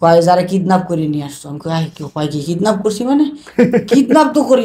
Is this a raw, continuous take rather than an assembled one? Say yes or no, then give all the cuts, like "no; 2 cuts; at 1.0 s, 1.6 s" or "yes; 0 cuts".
yes; 0 cuts